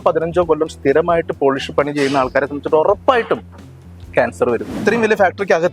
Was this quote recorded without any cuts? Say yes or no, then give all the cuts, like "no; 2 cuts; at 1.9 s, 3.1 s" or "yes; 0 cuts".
no; 1 cut; at 4.8 s